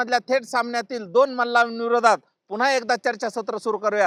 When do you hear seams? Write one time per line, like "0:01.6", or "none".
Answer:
none